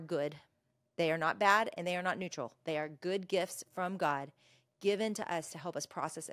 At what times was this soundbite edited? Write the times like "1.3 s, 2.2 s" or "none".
none